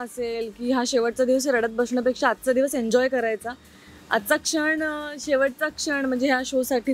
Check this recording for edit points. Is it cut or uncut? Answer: uncut